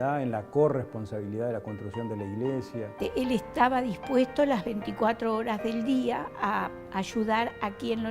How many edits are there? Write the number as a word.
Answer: one